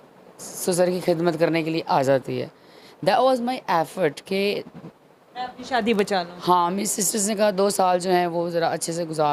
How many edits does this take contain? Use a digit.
0